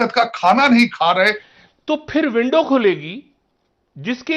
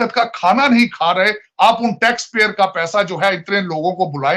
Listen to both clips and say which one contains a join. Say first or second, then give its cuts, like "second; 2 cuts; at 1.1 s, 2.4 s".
first; 1 cut; at 1.4 s